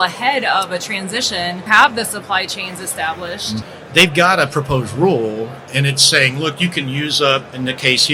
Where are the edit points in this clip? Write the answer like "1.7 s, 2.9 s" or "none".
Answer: 1.6 s, 3.7 s